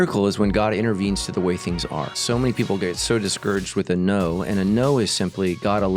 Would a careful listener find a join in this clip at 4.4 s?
no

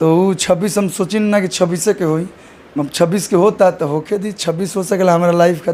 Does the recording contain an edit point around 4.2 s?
no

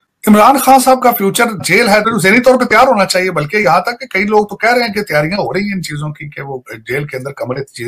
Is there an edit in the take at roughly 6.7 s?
no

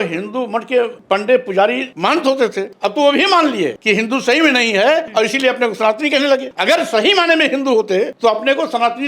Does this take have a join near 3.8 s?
yes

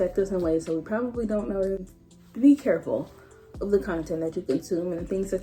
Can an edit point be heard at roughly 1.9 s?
yes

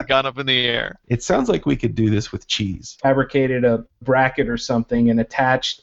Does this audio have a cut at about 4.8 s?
no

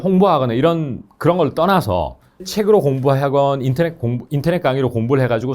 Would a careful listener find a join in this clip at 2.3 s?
yes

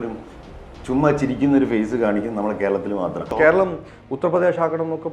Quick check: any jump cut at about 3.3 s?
yes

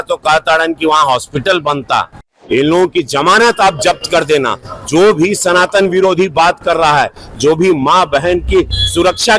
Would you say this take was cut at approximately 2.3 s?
yes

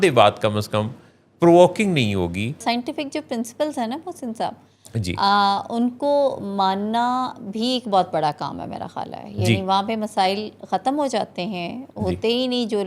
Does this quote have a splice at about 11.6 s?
no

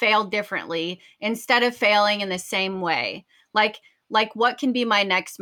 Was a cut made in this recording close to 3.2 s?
no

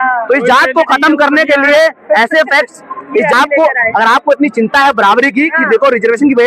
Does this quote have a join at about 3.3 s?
yes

